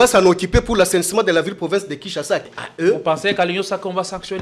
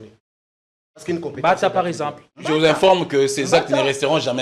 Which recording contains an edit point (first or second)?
first